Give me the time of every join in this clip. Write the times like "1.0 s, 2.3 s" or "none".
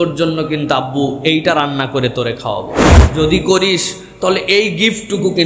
none